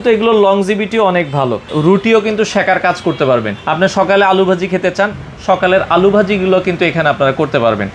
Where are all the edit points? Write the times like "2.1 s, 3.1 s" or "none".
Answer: 1.7 s, 3.6 s